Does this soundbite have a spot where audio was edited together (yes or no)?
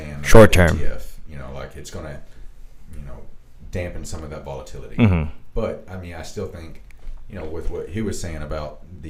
no